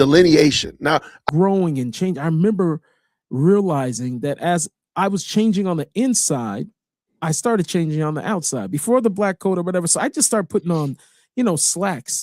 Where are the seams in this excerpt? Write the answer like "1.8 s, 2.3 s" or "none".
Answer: 1.2 s